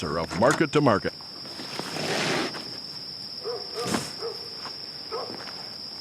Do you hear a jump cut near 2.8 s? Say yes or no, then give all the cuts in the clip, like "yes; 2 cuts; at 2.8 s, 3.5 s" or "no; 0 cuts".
no; 1 cut; at 1.1 s